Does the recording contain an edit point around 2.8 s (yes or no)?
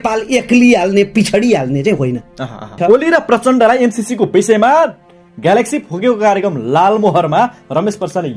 yes